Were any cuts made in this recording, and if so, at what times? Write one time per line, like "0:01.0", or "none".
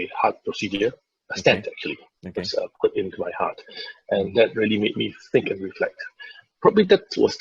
0:06.4